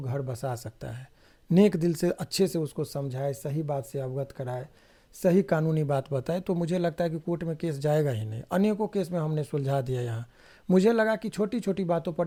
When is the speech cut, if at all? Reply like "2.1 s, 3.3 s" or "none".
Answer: none